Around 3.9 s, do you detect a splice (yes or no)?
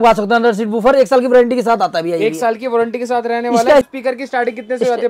yes